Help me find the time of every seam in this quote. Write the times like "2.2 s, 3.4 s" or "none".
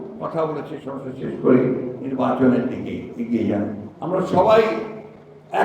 3.9 s